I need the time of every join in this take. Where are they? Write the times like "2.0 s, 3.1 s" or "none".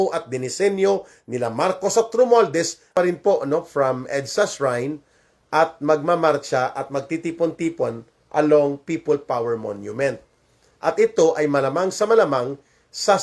2.9 s